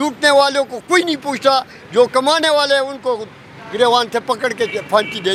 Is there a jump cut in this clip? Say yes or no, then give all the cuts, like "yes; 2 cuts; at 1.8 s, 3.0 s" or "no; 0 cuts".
no; 0 cuts